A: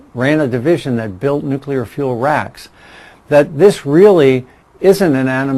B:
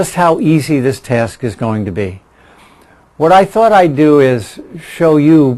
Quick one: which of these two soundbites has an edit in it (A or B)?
B